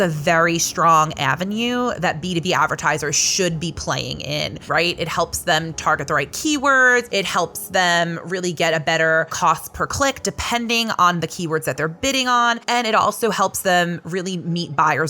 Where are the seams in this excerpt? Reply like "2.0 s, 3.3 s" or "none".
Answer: 4.6 s, 7.1 s, 9.3 s, 12.6 s